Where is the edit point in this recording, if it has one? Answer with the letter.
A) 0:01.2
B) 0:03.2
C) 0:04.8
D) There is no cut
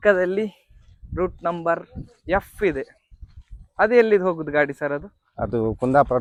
D